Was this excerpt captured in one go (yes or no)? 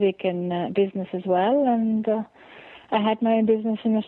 yes